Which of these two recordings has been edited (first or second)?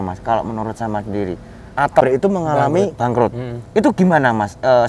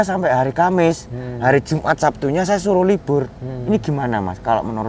first